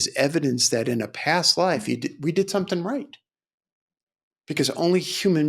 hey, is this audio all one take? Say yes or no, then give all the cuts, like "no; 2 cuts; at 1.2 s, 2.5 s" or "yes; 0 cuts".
yes; 0 cuts